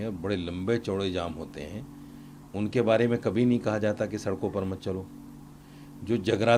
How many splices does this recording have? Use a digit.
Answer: 0